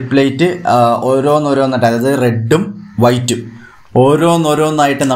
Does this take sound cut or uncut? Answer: uncut